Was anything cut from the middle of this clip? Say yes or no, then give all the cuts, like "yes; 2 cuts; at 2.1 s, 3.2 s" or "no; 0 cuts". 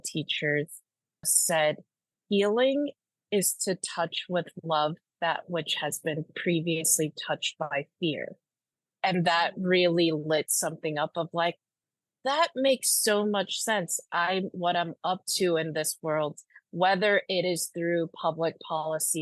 yes; 1 cut; at 1.4 s